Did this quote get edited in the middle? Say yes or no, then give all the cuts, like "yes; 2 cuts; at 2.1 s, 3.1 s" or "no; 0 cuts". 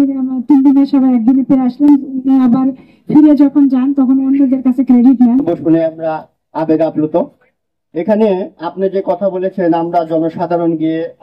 yes; 1 cut; at 5.5 s